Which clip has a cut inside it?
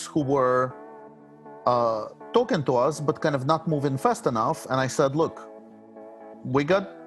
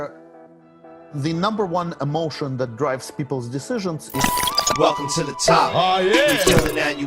second; 1 cut; at 4.2 s

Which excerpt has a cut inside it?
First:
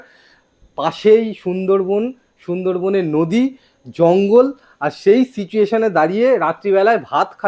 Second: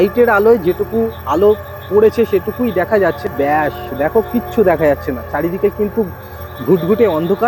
second; 1 cut; at 3.3 s

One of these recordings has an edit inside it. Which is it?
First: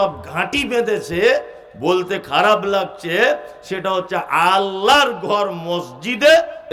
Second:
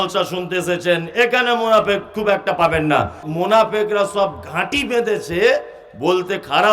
second; 1 cut; at 3.2 s

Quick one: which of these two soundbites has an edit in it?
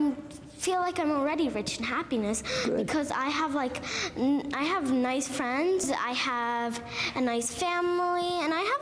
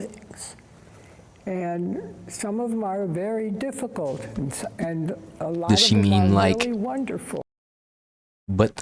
first; 1 cut; at 5.8 s

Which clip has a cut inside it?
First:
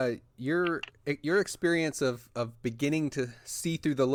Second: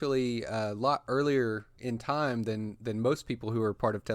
second; 1 cut; at 1.7 s

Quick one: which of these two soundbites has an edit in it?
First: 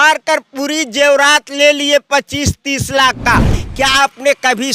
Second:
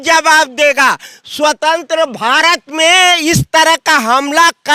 first; 1 cut; at 3.4 s

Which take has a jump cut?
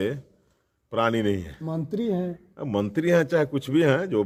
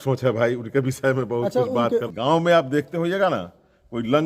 second; 1 cut; at 2.1 s

